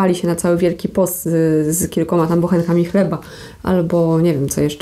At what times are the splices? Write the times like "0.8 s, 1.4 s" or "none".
none